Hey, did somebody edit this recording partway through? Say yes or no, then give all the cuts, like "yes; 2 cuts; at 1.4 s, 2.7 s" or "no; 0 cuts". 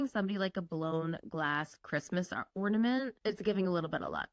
yes; 1 cut; at 3.2 s